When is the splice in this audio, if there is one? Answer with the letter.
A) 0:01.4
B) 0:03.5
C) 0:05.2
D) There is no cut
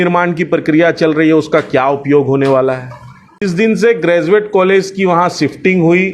B